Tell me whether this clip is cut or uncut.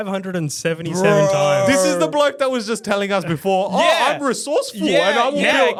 uncut